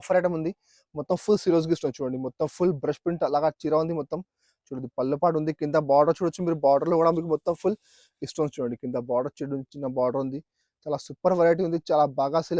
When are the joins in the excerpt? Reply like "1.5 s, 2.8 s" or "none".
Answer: none

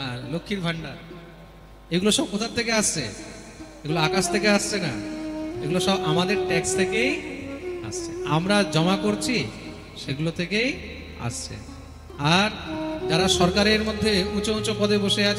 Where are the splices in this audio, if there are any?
none

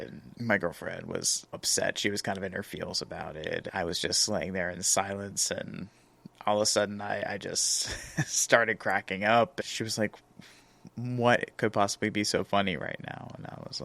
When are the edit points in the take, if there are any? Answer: 1.6 s, 3.6 s, 9.6 s

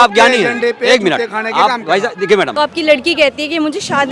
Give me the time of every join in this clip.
2.5 s

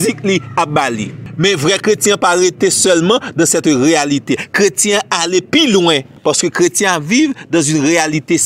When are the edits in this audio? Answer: none

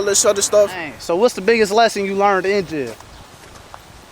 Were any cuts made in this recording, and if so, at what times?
0.9 s

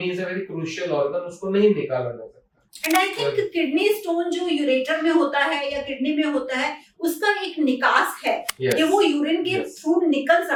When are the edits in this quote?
none

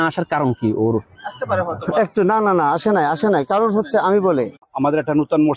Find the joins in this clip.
4.6 s

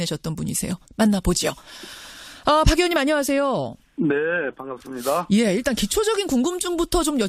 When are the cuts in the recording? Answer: none

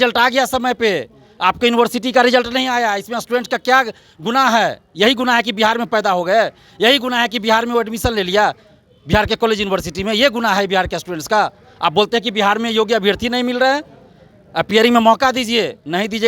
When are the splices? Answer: none

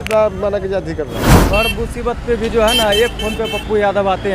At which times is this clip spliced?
1.2 s

